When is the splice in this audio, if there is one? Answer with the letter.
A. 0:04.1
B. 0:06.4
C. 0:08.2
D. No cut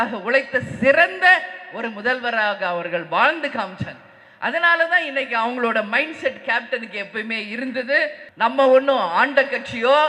C